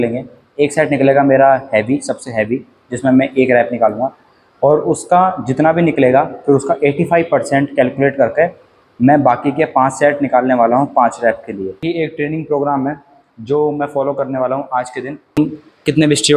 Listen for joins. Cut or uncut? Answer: cut